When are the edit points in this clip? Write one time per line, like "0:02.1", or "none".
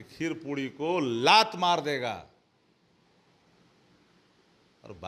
none